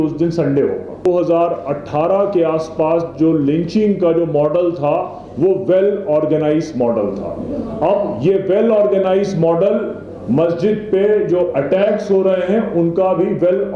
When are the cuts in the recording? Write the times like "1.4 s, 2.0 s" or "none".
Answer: 1.0 s